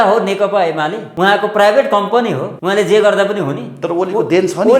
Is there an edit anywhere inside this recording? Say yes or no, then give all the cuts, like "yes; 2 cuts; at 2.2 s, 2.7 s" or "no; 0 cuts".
yes; 2 cuts; at 1.0 s, 2.5 s